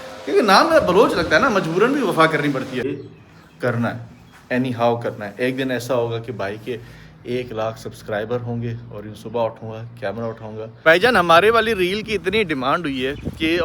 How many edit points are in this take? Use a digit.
2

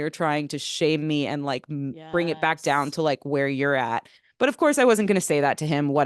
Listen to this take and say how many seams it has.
0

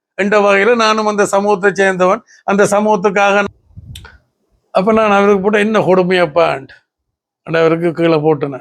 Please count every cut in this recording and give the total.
1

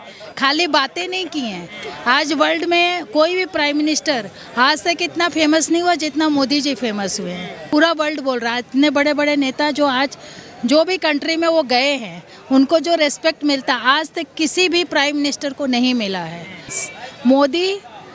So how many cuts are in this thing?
2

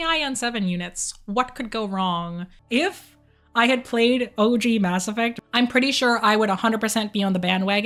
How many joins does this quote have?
2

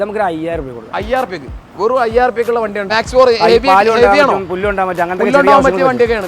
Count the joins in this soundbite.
1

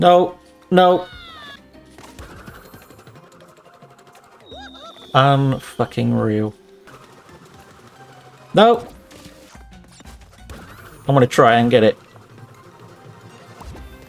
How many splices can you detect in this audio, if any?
3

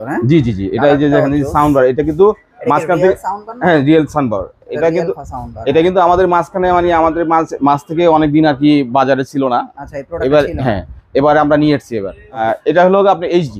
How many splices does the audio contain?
1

